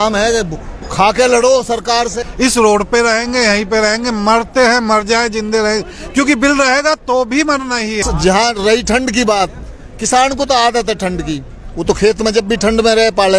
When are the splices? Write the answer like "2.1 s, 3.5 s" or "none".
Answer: 2.2 s, 8.0 s